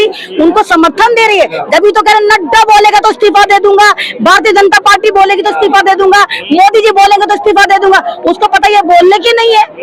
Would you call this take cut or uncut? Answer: uncut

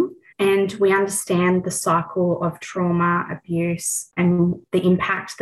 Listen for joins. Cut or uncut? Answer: uncut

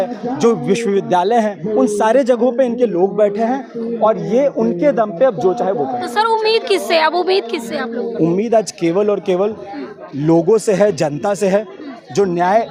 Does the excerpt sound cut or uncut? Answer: uncut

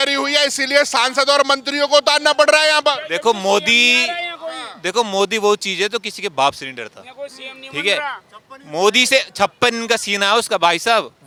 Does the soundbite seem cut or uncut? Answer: uncut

